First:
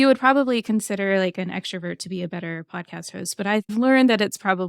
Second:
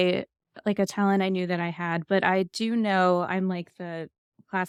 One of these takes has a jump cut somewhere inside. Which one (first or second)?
first